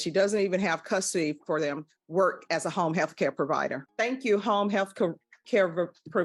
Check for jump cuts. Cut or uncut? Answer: uncut